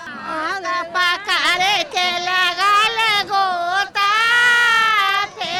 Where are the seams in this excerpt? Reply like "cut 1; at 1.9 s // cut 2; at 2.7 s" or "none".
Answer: none